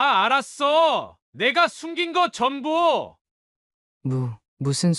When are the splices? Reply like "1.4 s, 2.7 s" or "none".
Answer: 3.2 s